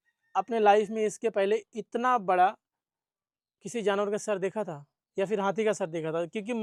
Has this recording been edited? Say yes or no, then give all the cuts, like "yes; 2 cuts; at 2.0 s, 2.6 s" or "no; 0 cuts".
no; 0 cuts